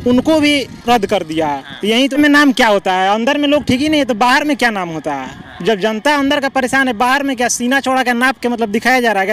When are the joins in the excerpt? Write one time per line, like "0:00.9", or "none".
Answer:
0:02.1